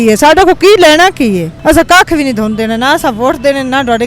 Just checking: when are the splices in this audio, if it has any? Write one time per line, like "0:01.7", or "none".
0:01.5